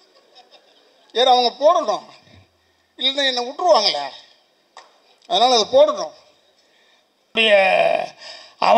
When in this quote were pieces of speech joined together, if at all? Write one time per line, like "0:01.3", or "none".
0:07.4